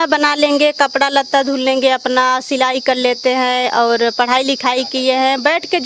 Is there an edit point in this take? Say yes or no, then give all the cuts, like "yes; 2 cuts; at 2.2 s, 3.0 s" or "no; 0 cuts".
no; 0 cuts